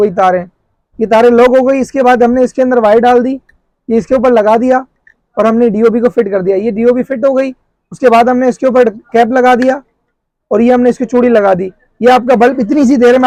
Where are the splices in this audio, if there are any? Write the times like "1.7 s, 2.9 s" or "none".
none